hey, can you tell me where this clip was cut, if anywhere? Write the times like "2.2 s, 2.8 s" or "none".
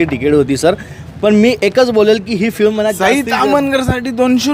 none